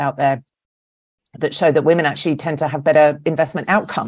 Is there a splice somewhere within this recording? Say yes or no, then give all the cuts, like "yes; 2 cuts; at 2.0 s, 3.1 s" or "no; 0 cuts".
no; 0 cuts